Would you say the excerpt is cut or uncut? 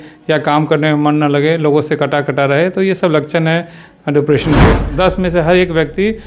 cut